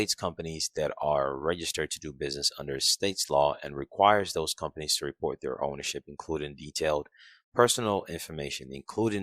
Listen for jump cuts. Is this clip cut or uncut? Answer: uncut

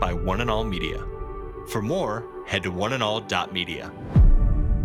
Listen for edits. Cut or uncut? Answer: uncut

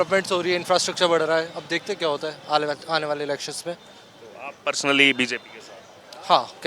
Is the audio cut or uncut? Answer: uncut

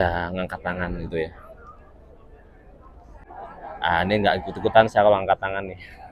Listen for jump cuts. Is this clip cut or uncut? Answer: cut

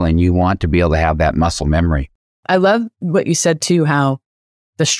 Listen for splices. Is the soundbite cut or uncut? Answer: cut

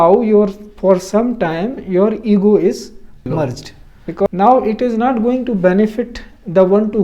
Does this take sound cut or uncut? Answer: cut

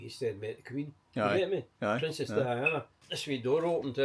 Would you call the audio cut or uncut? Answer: cut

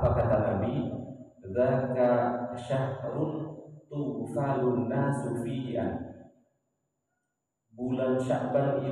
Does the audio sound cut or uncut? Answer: uncut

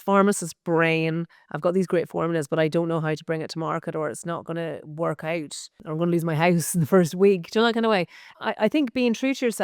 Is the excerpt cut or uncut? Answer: cut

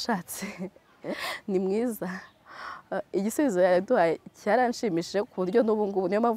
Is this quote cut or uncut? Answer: uncut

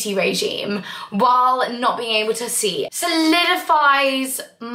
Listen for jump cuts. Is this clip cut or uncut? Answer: cut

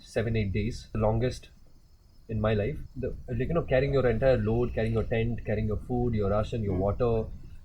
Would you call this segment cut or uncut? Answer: cut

